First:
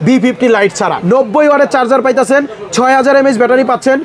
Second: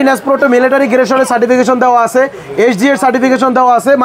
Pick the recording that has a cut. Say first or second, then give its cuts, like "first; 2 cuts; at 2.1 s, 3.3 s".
first; 1 cut; at 1.0 s